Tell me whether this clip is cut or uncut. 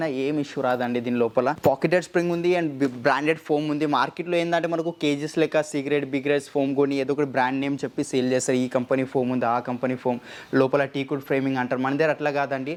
uncut